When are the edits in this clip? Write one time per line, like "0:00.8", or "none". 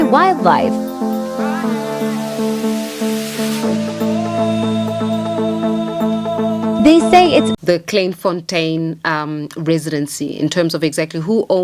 0:07.5